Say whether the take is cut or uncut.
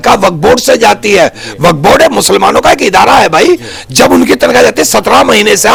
uncut